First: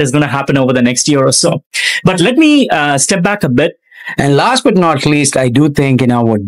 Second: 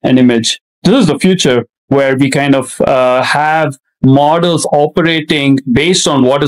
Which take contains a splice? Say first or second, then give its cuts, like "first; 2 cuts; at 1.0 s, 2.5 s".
first; 1 cut; at 3.7 s